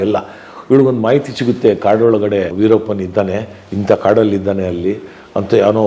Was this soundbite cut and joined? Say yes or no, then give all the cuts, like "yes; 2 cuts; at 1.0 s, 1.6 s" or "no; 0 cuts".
yes; 1 cut; at 2.5 s